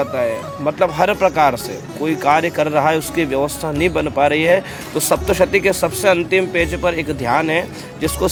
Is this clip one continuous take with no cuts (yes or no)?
yes